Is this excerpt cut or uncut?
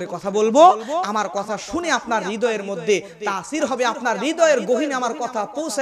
uncut